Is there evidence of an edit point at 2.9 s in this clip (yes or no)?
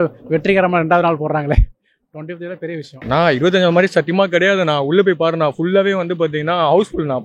yes